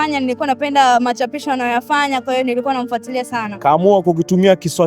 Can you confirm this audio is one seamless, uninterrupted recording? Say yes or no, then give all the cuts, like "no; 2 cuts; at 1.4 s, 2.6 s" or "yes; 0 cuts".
no; 1 cut; at 3.5 s